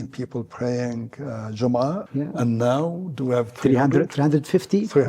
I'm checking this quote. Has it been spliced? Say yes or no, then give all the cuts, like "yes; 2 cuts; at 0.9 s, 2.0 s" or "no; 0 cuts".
yes; 1 cut; at 2.0 s